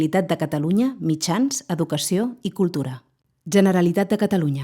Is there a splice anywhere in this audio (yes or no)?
yes